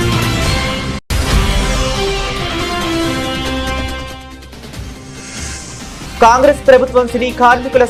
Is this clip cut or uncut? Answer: uncut